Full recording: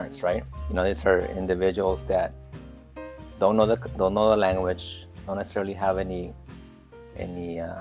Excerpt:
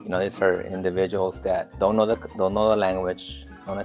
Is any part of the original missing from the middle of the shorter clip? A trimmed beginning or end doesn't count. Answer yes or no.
yes